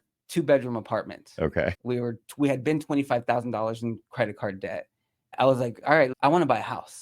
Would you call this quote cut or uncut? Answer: cut